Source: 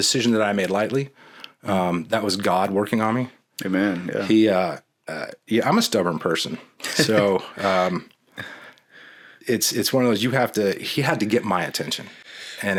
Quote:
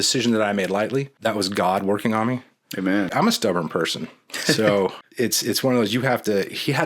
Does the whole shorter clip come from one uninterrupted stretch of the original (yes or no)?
no